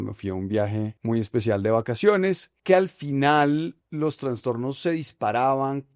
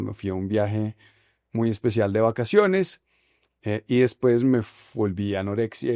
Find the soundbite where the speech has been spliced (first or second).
first